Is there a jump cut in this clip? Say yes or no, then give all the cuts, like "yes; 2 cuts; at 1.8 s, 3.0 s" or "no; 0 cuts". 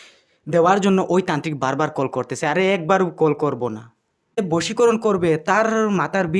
yes; 1 cut; at 4.4 s